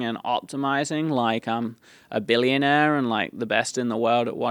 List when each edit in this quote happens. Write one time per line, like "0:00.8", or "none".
none